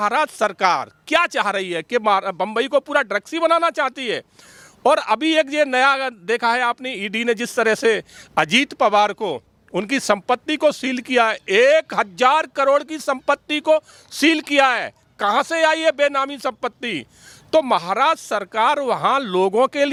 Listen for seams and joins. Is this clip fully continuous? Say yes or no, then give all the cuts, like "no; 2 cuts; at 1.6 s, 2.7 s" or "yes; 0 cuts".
yes; 0 cuts